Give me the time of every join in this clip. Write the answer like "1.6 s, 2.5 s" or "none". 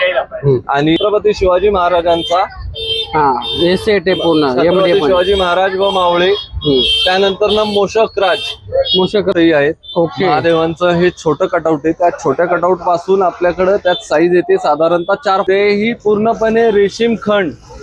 1.0 s, 9.3 s, 15.4 s